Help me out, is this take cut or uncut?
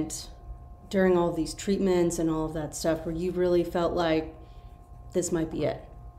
uncut